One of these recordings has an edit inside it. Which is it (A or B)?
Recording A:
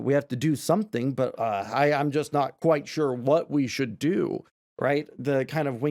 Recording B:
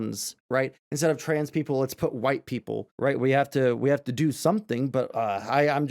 B